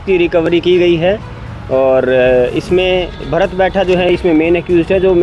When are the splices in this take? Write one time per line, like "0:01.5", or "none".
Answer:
none